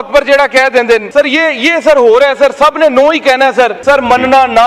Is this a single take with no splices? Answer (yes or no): no